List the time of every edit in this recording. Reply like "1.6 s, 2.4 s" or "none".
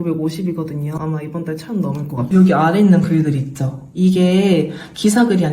1.0 s, 2.2 s